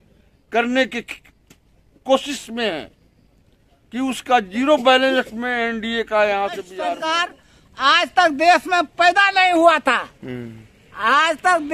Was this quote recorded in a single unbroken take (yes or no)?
no